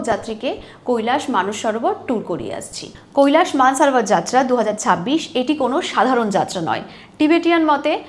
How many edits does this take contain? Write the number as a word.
one